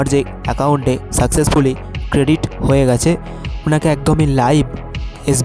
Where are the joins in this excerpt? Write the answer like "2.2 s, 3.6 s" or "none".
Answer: 3.6 s